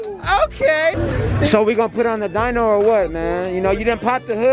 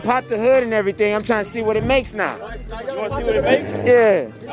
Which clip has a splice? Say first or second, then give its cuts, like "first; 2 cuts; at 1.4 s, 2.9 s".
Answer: first; 1 cut; at 0.9 s